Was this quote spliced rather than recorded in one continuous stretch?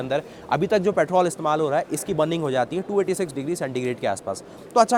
no; 0 cuts

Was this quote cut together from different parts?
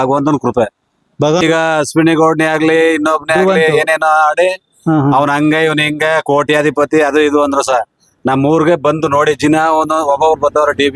yes; 1 cut; at 1.4 s

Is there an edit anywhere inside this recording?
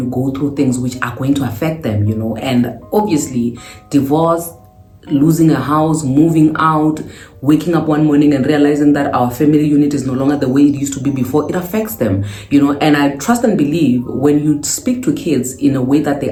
no; 0 cuts

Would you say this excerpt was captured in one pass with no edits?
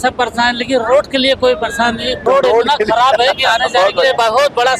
no; 1 cut; at 2.2 s

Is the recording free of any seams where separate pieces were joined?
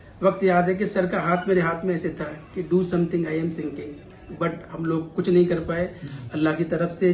yes; 0 cuts

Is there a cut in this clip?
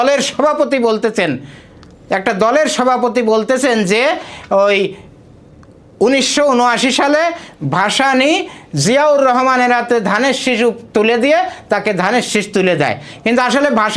no; 0 cuts

